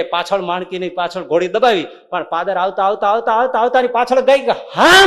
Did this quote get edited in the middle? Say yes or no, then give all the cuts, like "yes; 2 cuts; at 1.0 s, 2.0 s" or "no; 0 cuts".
no; 0 cuts